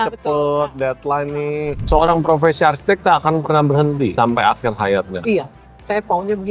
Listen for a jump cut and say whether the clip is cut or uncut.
cut